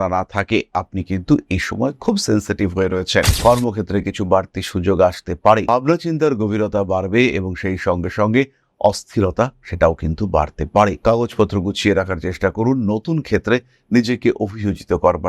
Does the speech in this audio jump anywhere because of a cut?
yes; 1 cut; at 3.3 s

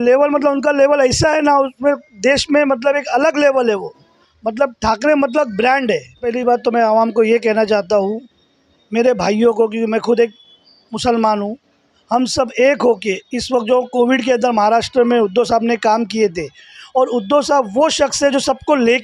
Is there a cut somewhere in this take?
yes; 1 cut; at 6.3 s

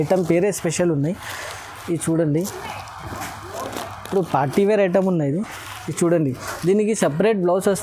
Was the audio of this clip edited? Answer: no; 0 cuts

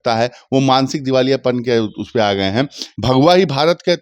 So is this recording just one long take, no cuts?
no; 1 cut; at 2.8 s

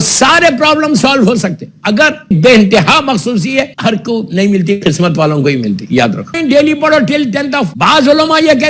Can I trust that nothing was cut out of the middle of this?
no; 4 cuts; at 2.3 s, 3.7 s, 6.4 s, 7.7 s

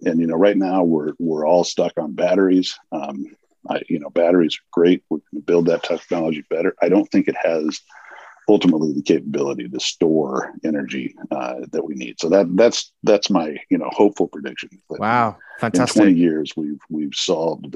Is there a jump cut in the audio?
no; 0 cuts

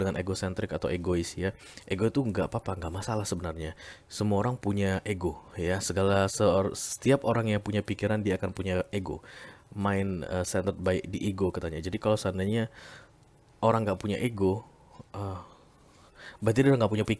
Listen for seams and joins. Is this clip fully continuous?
yes; 0 cuts

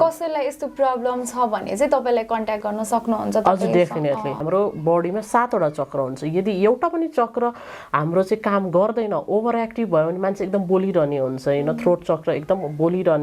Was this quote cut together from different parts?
yes; 1 cut; at 4.4 s

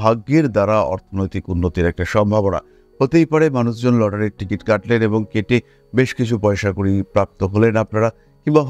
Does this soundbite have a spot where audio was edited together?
no; 0 cuts

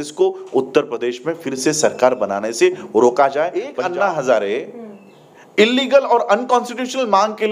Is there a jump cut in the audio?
yes; 1 cut; at 3.7 s

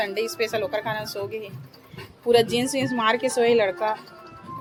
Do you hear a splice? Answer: no; 0 cuts

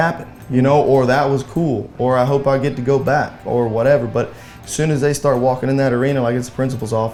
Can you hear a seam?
no; 0 cuts

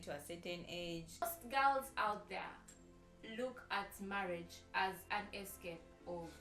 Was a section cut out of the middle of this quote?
yes; 1 cut; at 1.2 s

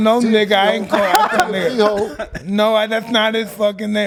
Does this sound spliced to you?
no; 0 cuts

